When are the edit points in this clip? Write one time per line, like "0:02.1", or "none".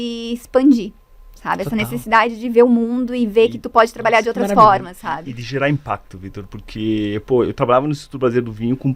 none